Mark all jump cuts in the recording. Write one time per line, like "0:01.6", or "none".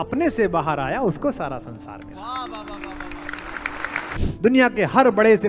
0:04.1